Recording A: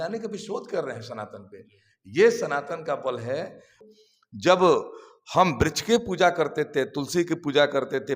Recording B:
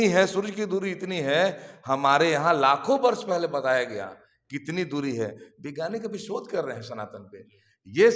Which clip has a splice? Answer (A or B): A